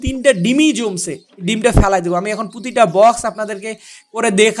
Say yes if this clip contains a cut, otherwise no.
no